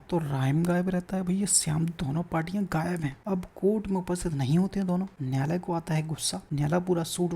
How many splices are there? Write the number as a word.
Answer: three